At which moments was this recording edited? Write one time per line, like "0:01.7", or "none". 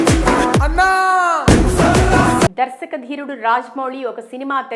none